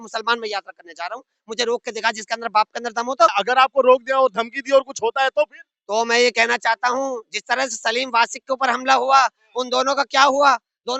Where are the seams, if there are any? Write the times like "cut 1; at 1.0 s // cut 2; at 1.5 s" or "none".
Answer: cut 1; at 3.4 s